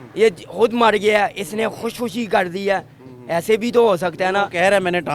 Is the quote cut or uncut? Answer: uncut